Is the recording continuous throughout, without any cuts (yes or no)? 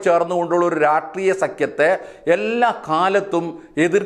yes